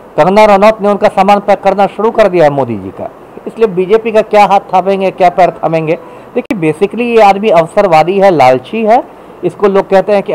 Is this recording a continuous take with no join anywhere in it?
yes; 0 cuts

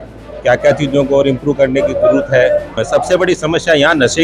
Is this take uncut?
no; 1 cut; at 2.8 s

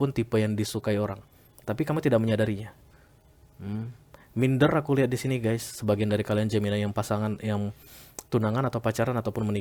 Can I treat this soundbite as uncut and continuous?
yes; 0 cuts

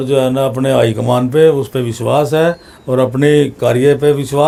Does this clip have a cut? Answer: no; 0 cuts

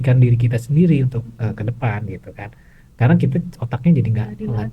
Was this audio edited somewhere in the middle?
no; 0 cuts

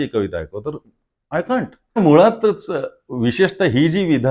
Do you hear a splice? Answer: yes; 1 cut; at 2.0 s

